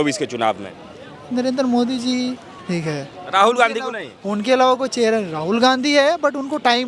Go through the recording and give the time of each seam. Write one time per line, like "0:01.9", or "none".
none